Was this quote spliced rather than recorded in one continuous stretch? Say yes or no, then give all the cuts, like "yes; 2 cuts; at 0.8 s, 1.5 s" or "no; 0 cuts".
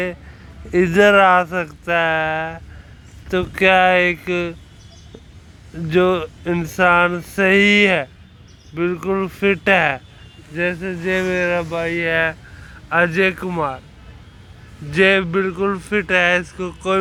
no; 0 cuts